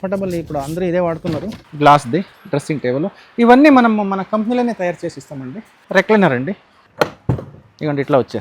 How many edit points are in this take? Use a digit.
2